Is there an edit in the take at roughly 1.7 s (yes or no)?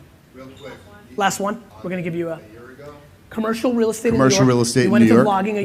yes